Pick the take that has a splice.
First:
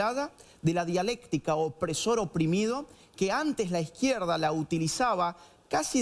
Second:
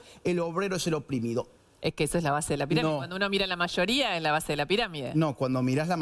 second; 1 cut; at 1.5 s

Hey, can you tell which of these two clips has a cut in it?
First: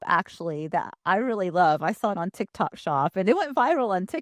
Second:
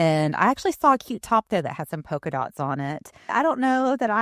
second; 1 cut; at 3.3 s

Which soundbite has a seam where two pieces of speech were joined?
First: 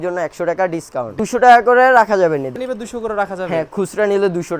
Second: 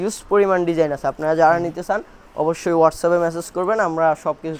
first; 2 cuts; at 1.2 s, 2.5 s

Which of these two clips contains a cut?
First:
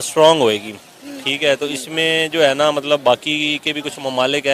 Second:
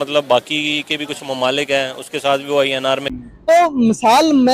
second; 1 cut; at 3.2 s

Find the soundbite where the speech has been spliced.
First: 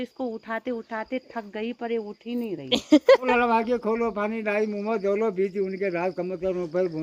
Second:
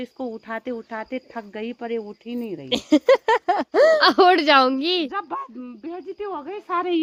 first; 1 cut; at 3.2 s

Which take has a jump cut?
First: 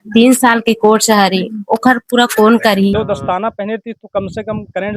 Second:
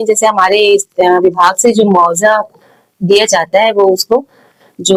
first; 1 cut; at 2.9 s

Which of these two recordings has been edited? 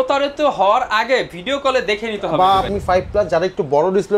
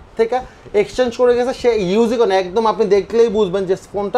first; 1 cut; at 2.7 s

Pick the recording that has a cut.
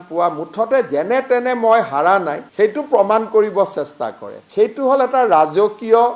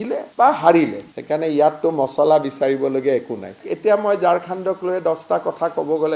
second; 2 cuts; at 1.1 s, 3.5 s

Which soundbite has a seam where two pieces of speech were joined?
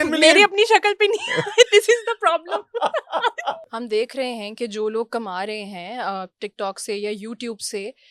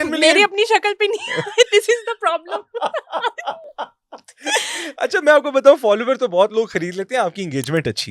first; 1 cut; at 3.7 s

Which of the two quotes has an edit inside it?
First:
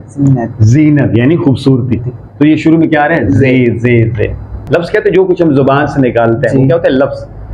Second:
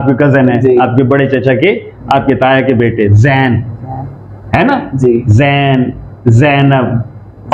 first; 1 cut; at 4.6 s

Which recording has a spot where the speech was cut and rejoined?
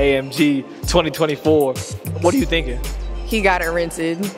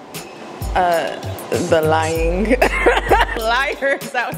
second; 1 cut; at 3.3 s

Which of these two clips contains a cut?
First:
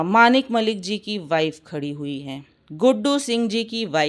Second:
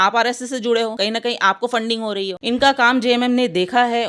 second; 2 cuts; at 0.9 s, 2.4 s

